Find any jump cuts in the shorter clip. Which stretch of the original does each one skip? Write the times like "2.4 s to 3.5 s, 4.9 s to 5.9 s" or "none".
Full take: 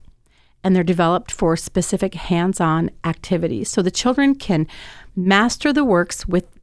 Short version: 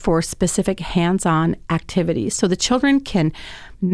none